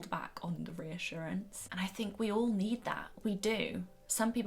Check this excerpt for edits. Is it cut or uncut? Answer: cut